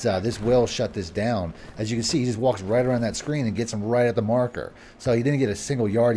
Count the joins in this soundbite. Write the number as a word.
zero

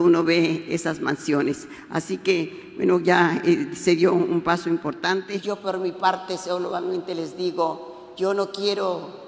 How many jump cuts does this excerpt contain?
one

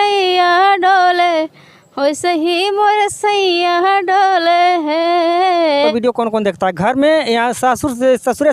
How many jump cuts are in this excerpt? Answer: one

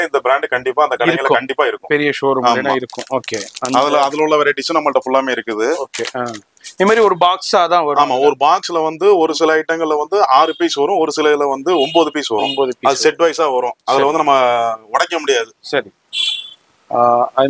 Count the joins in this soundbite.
zero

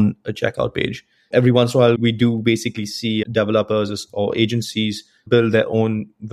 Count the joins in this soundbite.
four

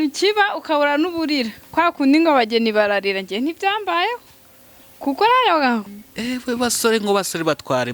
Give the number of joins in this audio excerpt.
one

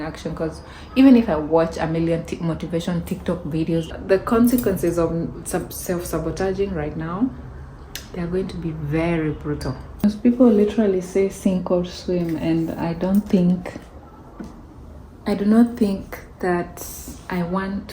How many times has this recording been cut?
two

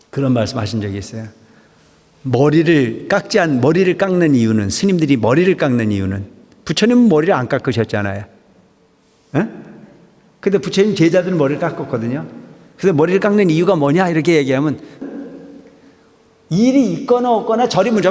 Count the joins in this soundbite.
one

